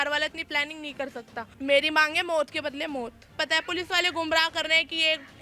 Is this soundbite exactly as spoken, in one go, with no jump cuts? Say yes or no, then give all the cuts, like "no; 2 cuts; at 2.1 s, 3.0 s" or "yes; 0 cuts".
no; 2 cuts; at 1.4 s, 3.3 s